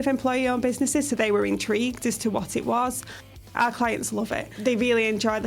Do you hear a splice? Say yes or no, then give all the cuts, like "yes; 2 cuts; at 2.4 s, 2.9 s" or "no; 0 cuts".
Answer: yes; 2 cuts; at 3.5 s, 4.5 s